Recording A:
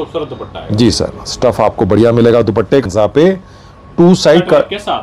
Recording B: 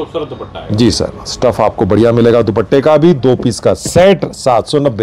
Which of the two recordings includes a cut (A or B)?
A